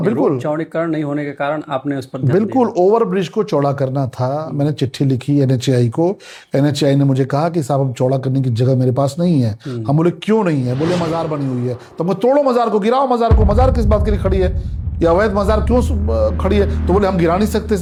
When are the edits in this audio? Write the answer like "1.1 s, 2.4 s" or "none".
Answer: none